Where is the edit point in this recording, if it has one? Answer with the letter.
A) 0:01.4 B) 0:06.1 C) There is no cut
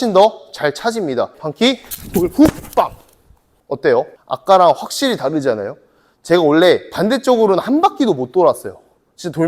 A